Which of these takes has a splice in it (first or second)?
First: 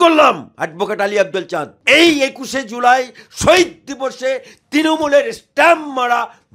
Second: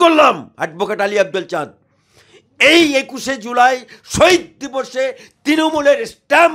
first